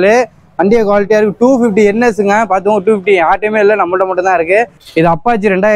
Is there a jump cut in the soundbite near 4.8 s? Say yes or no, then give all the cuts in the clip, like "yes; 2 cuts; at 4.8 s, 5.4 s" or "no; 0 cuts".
yes; 1 cut; at 4.8 s